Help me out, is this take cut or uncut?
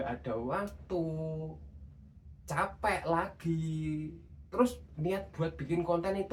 uncut